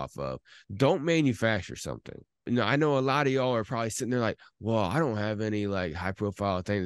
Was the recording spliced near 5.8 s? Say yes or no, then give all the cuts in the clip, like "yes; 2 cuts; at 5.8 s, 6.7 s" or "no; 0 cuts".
no; 1 cut; at 2.5 s